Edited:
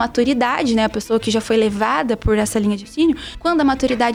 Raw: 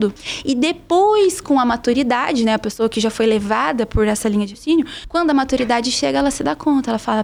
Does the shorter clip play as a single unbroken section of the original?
yes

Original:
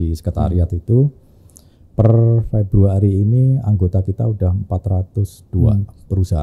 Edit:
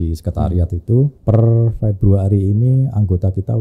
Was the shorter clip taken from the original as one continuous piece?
no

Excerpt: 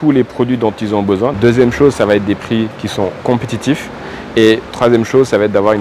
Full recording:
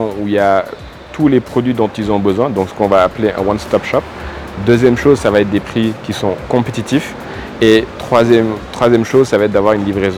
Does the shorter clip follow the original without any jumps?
no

